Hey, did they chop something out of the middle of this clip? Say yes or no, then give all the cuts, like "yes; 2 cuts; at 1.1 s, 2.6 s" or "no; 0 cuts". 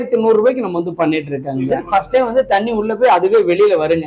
yes; 1 cut; at 1.8 s